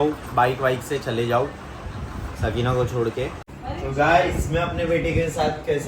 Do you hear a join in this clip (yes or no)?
yes